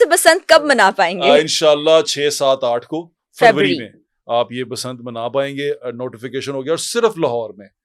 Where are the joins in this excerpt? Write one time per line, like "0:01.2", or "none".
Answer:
none